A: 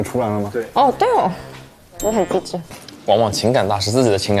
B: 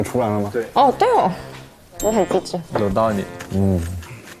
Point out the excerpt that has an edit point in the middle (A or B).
A